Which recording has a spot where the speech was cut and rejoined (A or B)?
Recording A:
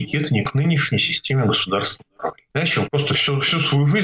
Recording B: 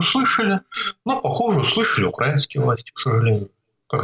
A